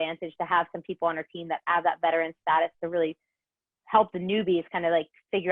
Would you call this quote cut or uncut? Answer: uncut